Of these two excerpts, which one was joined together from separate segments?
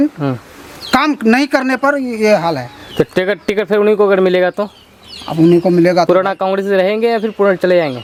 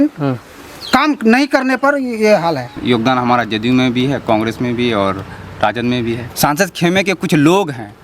second; 2 cuts; at 2.7 s, 6.2 s

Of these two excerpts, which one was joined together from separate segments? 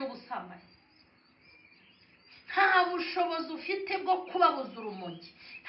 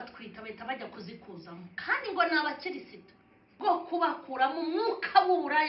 second; 1 cut; at 3.5 s

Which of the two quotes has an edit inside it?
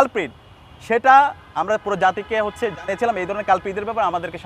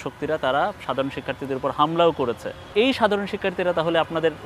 second; 1 cut; at 2.7 s

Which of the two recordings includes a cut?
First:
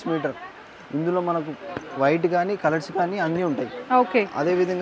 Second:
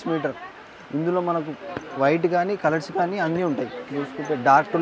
second; 1 cut; at 3.8 s

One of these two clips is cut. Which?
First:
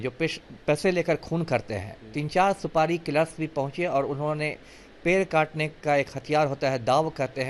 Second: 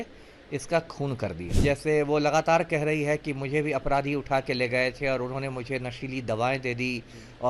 second; 1 cut; at 1.5 s

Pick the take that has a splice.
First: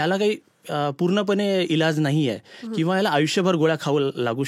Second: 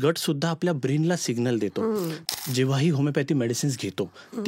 second; 1 cut; at 2.2 s

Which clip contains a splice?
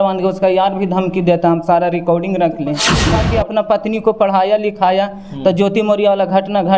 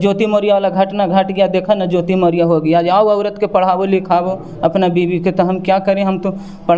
first; 1 cut; at 3.0 s

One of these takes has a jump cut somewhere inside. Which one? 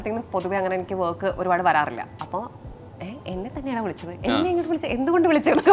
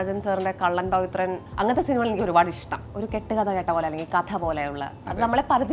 second; 2 cuts; at 1.4 s, 2.7 s

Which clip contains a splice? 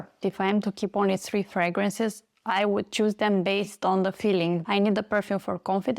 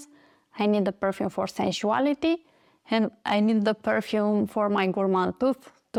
first; 1 cut; at 4.6 s

